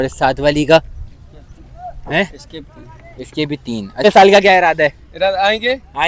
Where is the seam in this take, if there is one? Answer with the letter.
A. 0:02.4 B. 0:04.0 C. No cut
B